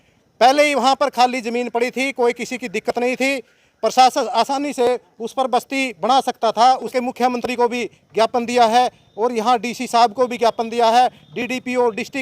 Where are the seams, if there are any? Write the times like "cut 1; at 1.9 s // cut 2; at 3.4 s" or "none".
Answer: cut 1; at 6.9 s